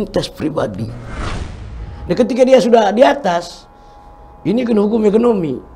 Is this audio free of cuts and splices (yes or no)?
no